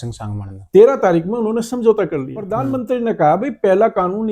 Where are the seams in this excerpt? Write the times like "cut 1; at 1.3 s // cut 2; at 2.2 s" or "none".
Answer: cut 1; at 2.5 s